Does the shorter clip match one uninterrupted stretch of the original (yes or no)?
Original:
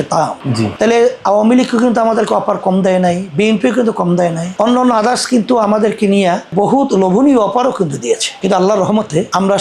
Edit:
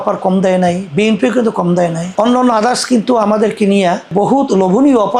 yes